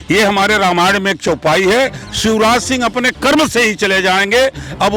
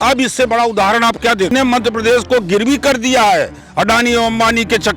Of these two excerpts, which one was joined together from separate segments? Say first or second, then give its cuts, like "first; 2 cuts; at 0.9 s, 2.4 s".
second; 1 cut; at 1.5 s